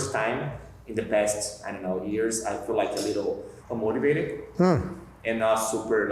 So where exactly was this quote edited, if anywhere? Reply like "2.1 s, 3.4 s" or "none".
3.5 s